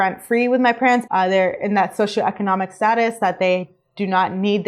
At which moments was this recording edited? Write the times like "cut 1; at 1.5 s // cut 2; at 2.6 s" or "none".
cut 1; at 1.0 s